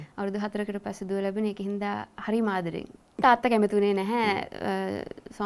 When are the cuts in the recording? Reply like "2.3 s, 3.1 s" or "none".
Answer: 3.1 s